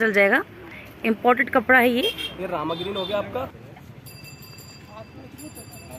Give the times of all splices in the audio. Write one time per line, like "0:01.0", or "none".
0:03.6